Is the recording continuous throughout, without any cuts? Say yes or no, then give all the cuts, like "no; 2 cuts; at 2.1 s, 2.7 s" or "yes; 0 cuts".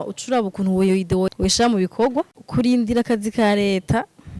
no; 2 cuts; at 1.3 s, 2.4 s